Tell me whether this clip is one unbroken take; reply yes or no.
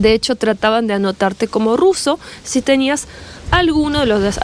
yes